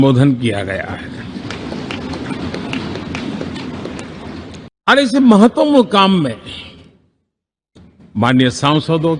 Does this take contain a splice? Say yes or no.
no